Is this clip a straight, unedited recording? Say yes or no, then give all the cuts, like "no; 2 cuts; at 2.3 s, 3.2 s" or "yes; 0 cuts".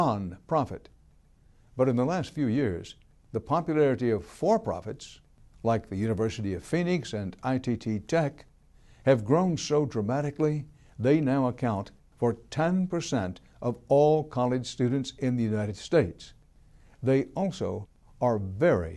yes; 0 cuts